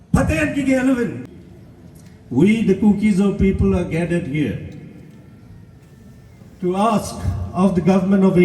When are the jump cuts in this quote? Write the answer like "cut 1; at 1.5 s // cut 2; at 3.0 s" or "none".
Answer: cut 1; at 1.2 s